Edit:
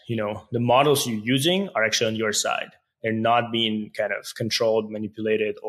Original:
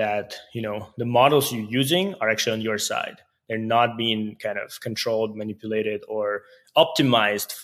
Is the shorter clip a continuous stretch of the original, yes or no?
yes